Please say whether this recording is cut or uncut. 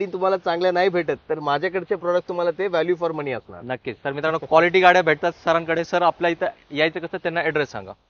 uncut